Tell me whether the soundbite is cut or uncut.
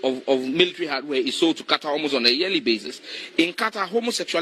uncut